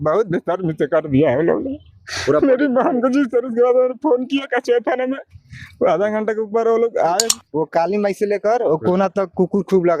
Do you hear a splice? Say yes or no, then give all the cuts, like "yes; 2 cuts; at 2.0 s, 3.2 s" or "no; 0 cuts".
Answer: yes; 1 cut; at 7.4 s